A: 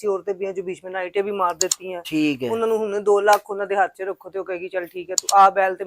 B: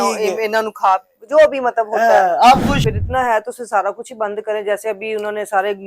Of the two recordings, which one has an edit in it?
B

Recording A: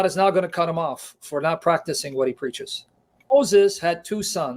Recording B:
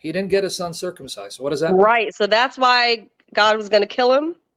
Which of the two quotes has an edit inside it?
A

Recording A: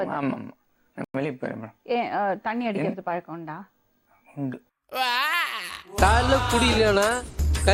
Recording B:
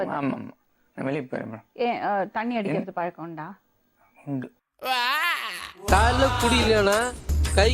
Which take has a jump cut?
B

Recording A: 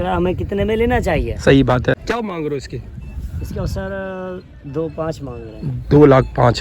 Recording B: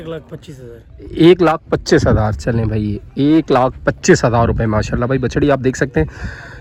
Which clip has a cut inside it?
A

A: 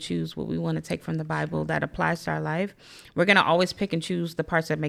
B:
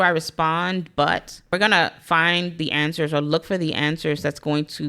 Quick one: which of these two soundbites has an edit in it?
B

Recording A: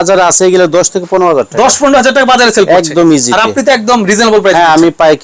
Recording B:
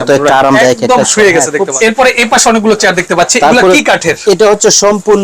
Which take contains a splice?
B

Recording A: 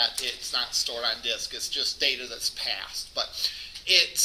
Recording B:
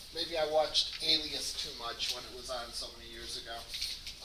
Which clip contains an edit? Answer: B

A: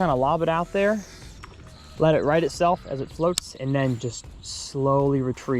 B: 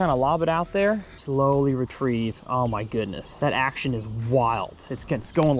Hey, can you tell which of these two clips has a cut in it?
B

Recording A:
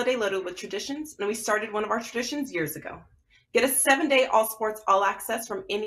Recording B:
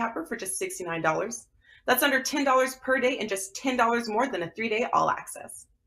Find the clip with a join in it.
B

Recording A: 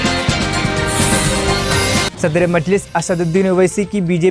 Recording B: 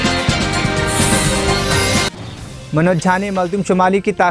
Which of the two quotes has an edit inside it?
B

